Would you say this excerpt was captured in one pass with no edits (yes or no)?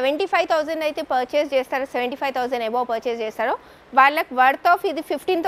yes